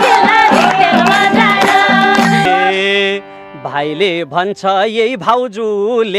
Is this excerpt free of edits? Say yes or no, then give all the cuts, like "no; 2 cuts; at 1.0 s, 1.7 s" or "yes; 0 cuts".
no; 1 cut; at 2.5 s